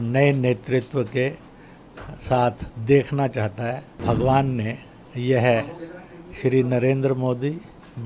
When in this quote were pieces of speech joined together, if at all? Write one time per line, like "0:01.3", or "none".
0:04.0